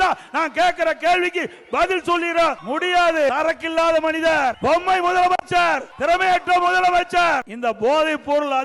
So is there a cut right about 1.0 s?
no; 5 cuts; at 2.6 s, 3.3 s, 4.6 s, 5.9 s, 7.5 s

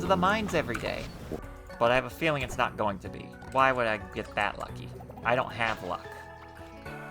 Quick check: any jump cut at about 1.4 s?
yes; 1 cut; at 1.4 s

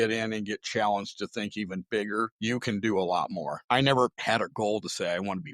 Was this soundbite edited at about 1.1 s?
no; 3 cuts; at 2.3 s, 3.6 s, 4.2 s

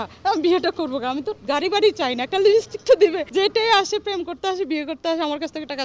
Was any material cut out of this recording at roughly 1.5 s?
no; 1 cut; at 3.2 s

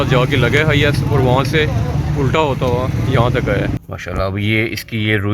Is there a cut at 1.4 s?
no; 1 cut; at 3.7 s

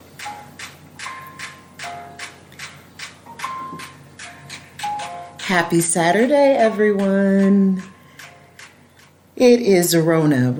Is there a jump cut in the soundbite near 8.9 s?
no; 0 cuts

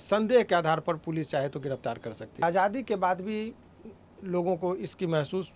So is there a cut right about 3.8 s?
no; 1 cut; at 2.4 s

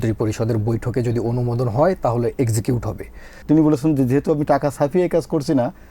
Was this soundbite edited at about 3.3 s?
yes; 1 cut; at 3.3 s

